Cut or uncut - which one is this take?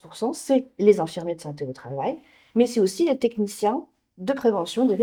uncut